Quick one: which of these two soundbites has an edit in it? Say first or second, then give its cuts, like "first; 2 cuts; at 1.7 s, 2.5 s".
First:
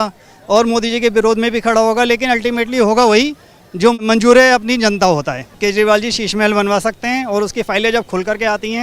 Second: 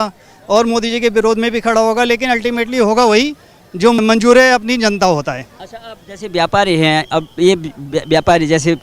first; 1 cut; at 5.5 s